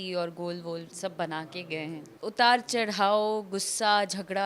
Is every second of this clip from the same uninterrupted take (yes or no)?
no